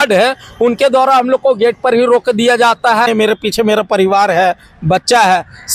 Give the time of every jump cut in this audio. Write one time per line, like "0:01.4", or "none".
0:03.1